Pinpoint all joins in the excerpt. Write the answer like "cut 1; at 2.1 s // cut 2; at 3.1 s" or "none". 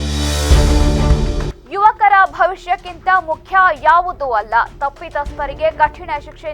cut 1; at 1.4 s